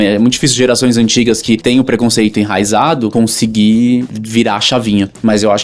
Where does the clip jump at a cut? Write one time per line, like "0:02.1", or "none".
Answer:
0:01.6
0:03.1
0:04.1